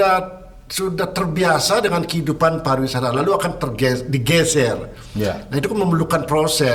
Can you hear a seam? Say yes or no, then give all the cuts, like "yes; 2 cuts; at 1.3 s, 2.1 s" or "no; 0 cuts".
no; 0 cuts